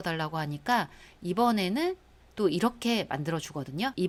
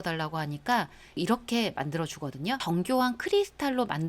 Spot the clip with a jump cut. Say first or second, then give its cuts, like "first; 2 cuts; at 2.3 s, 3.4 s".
second; 2 cuts; at 1.2 s, 2.6 s